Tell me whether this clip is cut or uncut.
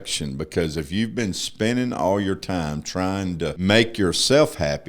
cut